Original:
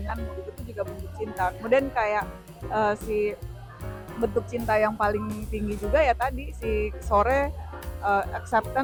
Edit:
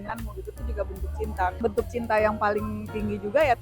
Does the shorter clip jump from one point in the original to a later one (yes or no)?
yes